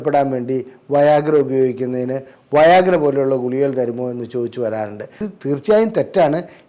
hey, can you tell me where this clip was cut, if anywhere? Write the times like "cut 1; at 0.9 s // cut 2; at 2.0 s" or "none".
cut 1; at 5.2 s